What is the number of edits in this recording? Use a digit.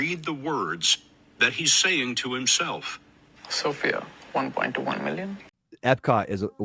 1